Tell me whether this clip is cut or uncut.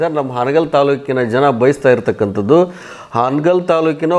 uncut